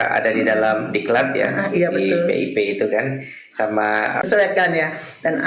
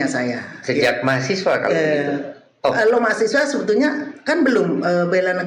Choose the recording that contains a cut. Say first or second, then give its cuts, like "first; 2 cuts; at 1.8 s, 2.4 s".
first; 1 cut; at 4.2 s